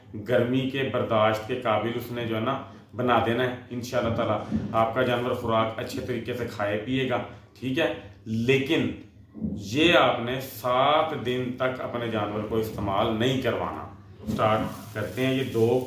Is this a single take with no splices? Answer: no; 1 cut; at 14.3 s

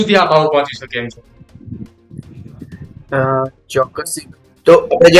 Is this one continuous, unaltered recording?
yes; 0 cuts

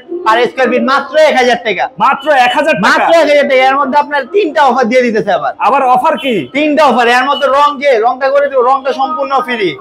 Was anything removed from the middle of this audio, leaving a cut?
no; 0 cuts

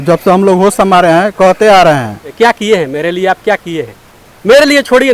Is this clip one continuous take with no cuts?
no; 1 cut; at 2.3 s

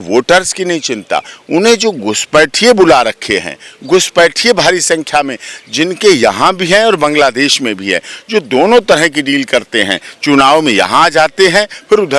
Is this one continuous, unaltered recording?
yes; 0 cuts

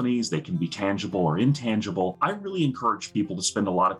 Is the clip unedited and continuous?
no; 1 cut; at 2.2 s

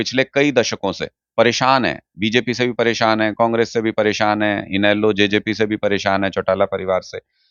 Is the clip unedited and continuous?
yes; 0 cuts

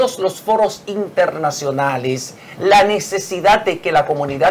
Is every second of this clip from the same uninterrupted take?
yes; 0 cuts

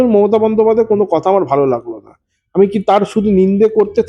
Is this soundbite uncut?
yes; 0 cuts

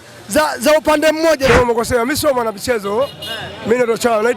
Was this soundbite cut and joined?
yes; 1 cut; at 1.5 s

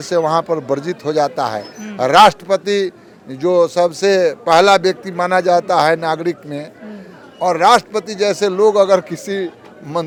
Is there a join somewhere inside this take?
no; 0 cuts

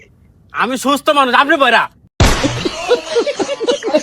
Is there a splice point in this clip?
yes; 1 cut; at 2.0 s

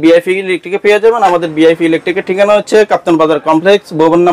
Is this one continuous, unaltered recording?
yes; 0 cuts

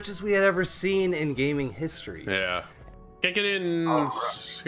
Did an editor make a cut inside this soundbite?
yes; 1 cut; at 2.8 s

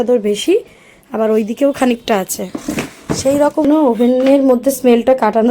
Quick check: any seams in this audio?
yes; 1 cut; at 3.6 s

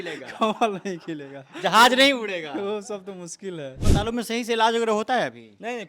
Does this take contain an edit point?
yes; 1 cut; at 3.8 s

